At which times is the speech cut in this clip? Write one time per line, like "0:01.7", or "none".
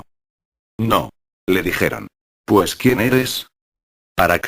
0:01.2